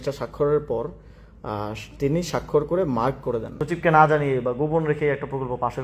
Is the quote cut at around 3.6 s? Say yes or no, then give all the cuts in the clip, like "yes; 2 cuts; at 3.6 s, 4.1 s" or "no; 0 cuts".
yes; 1 cut; at 3.6 s